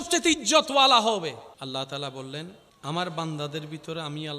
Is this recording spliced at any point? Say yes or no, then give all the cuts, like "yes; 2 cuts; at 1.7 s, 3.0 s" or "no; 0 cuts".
yes; 2 cuts; at 1.5 s, 2.6 s